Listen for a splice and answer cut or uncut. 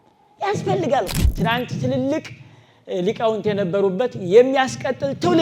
cut